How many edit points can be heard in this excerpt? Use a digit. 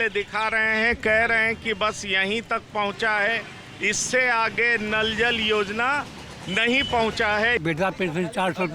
1